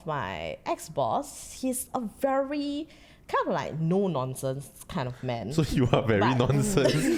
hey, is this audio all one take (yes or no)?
yes